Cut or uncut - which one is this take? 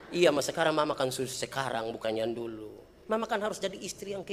uncut